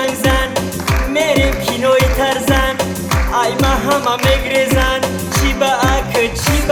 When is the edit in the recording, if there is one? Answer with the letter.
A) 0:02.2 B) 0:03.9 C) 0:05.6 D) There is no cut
D